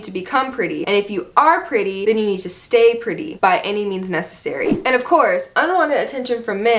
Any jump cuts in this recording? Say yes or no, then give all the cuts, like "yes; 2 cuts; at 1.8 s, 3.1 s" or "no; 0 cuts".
yes; 3 cuts; at 0.8 s, 1.9 s, 4.7 s